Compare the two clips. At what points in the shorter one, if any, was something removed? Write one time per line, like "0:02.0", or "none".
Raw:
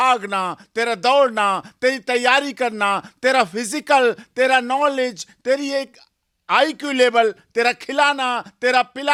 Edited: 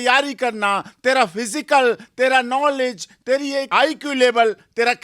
0:03.7